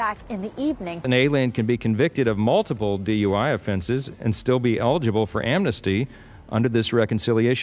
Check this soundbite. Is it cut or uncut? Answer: uncut